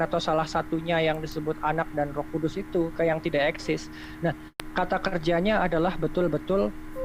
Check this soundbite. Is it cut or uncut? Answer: cut